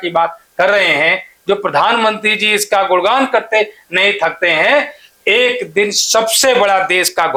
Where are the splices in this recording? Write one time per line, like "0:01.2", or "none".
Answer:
none